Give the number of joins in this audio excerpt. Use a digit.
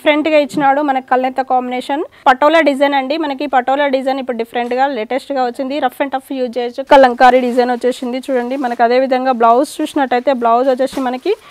2